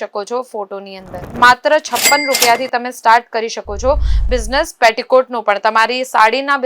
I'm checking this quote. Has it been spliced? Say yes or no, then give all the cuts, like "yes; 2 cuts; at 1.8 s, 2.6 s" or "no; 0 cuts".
yes; 1 cut; at 1.3 s